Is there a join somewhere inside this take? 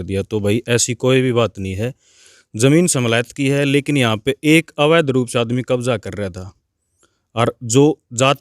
no; 0 cuts

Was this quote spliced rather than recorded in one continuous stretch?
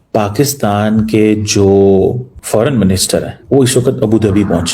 yes; 2 cuts; at 2.3 s, 3.4 s

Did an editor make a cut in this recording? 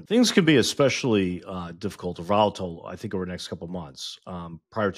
no; 0 cuts

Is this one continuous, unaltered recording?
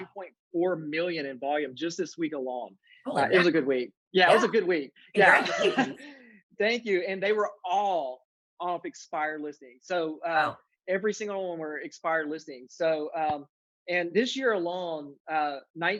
yes; 0 cuts

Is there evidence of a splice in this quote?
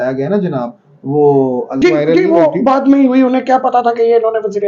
yes; 1 cut; at 1.8 s

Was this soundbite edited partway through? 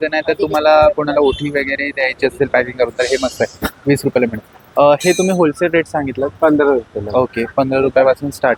no; 0 cuts

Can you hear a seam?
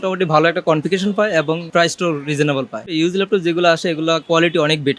yes; 3 cuts; at 1.7 s, 2.9 s, 4.2 s

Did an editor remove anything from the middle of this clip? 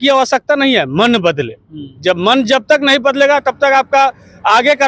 no; 0 cuts

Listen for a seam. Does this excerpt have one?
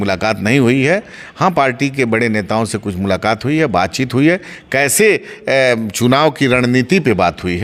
no; 0 cuts

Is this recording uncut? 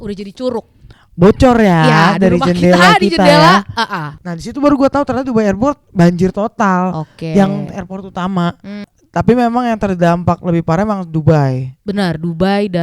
no; 2 cuts; at 4.0 s, 9.0 s

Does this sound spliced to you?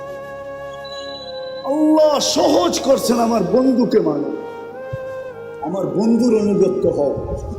yes; 2 cuts; at 4.4 s, 5.6 s

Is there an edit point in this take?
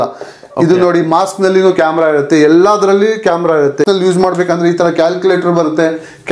yes; 1 cut; at 3.8 s

